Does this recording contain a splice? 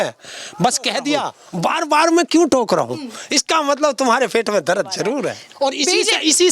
yes; 2 cuts; at 1.4 s, 5.4 s

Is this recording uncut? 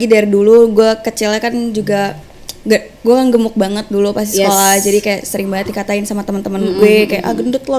yes; 0 cuts

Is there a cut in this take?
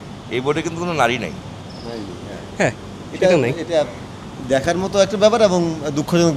no; 0 cuts

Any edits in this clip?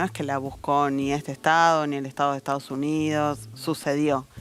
no; 0 cuts

